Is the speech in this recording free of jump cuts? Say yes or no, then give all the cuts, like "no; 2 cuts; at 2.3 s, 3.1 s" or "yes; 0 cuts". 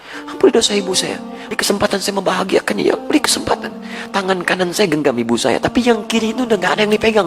no; 1 cut; at 1.5 s